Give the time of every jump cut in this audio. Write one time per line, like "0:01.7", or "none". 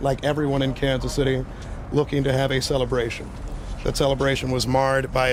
none